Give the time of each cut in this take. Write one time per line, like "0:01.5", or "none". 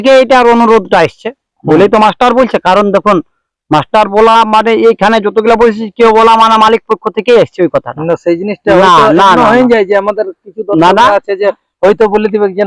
none